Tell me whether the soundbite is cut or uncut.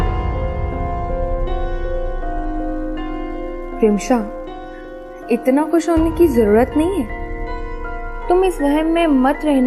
uncut